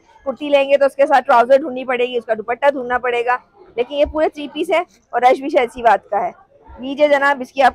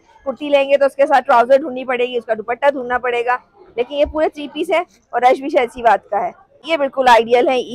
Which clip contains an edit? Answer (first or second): second